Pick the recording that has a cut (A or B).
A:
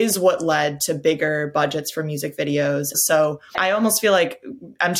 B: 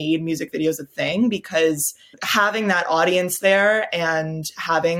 A